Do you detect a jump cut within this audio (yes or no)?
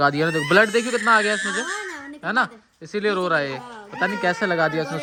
no